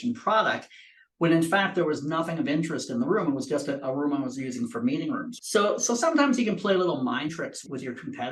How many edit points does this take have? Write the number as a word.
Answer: one